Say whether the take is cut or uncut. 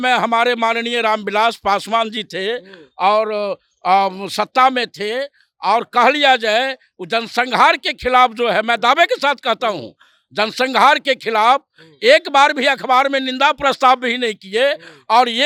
uncut